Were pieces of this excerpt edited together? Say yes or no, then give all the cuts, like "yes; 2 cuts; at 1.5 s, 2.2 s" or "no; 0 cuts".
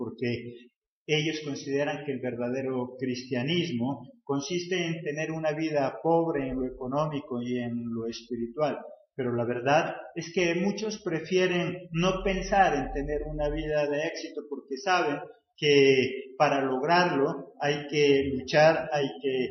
no; 0 cuts